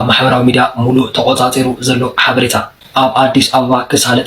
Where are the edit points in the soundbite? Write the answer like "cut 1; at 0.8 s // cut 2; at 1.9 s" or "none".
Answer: none

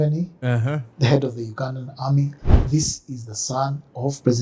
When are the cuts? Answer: cut 1; at 2.4 s

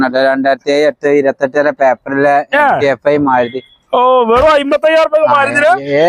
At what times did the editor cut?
none

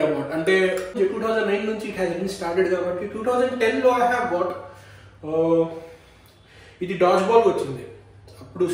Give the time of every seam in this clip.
cut 1; at 0.9 s

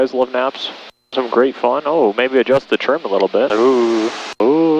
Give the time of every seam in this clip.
cut 1; at 1.1 s

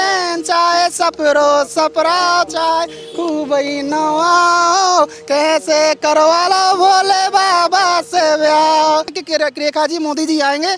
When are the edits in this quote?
cut 1; at 9.2 s

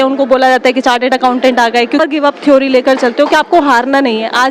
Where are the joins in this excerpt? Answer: cut 1; at 2.0 s

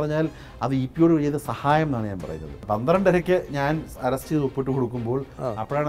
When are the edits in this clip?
cut 1; at 2.6 s

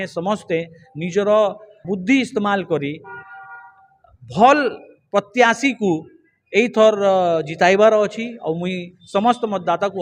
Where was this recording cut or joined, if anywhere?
cut 1; at 1.8 s

